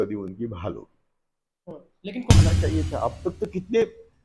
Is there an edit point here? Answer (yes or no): yes